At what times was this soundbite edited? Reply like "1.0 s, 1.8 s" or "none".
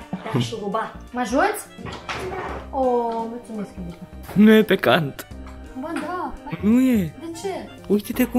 1.0 s, 4.2 s